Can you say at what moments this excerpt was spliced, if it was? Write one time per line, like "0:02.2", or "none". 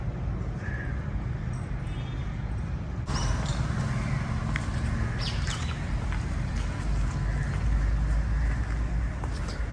0:03.1